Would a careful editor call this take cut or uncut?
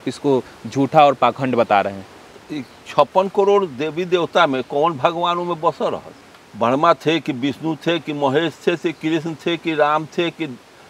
uncut